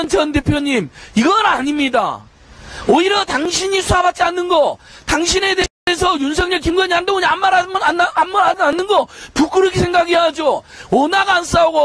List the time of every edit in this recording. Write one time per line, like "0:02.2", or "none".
none